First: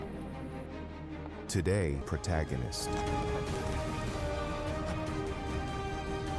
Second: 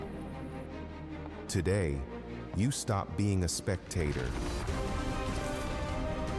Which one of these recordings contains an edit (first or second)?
first